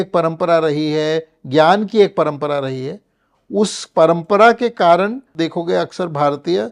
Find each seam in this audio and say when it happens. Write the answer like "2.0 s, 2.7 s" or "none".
5.2 s